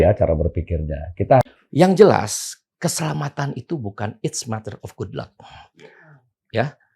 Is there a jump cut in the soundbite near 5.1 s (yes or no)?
no